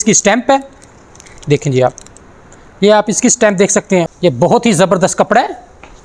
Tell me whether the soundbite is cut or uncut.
cut